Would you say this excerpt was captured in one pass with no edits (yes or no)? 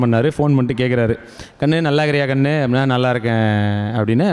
yes